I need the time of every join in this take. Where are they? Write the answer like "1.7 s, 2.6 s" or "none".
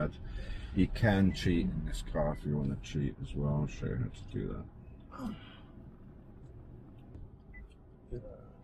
7.1 s